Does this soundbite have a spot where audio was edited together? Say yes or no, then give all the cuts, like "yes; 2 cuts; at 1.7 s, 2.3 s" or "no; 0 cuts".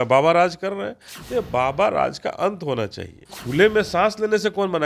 yes; 1 cut; at 3.4 s